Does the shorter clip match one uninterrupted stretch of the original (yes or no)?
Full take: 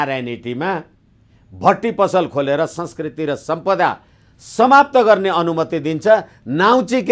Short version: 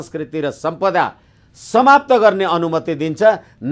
yes